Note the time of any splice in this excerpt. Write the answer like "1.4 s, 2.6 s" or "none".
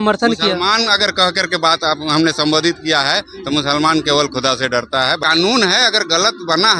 5.2 s